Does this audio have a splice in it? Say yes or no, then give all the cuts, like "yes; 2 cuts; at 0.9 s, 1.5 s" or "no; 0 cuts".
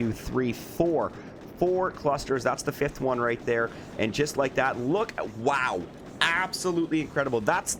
no; 0 cuts